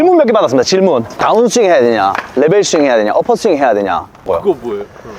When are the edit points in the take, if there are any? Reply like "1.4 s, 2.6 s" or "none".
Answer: 1.2 s, 4.3 s

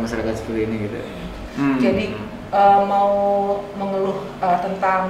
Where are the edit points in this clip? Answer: 1.4 s

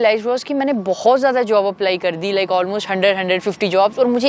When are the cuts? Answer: none

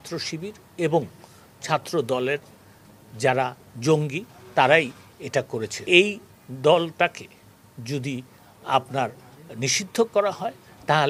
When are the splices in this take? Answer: 5.7 s

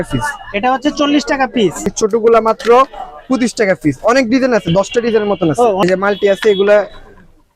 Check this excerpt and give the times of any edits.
1.8 s, 5.8 s

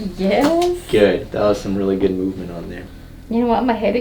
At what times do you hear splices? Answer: none

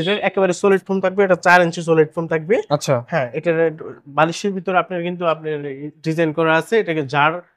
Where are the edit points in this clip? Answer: none

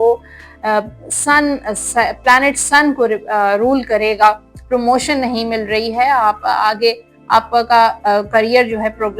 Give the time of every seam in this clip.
4.5 s

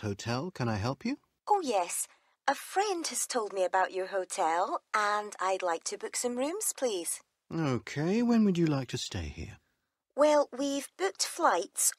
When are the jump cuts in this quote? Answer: 1.3 s

